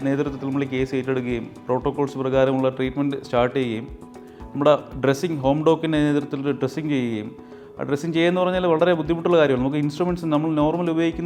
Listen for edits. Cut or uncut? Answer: uncut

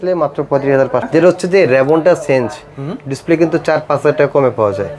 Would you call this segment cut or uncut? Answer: cut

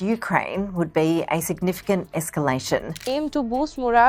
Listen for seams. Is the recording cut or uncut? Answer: cut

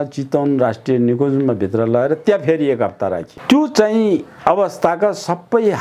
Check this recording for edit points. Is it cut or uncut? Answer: cut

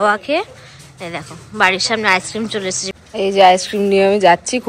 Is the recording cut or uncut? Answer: cut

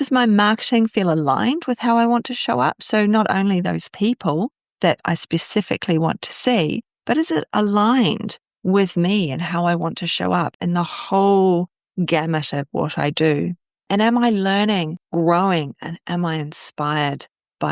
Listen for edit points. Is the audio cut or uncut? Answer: uncut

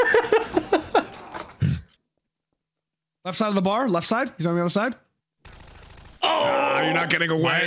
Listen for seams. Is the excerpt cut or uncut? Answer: uncut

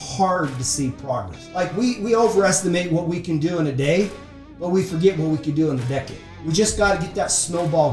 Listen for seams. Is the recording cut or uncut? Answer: cut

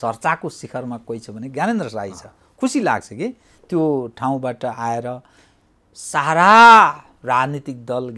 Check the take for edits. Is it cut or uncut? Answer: uncut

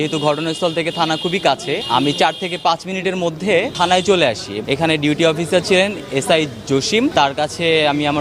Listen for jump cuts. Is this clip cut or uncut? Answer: cut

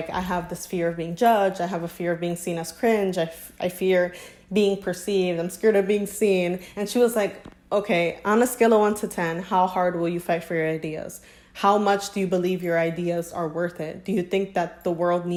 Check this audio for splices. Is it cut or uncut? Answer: uncut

